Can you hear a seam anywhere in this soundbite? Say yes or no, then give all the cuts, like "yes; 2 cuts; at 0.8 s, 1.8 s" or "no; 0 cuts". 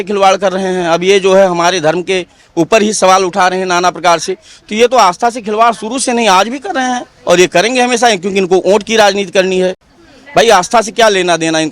no; 0 cuts